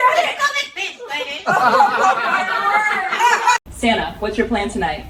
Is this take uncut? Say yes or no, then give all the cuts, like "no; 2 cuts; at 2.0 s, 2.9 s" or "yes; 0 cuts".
yes; 0 cuts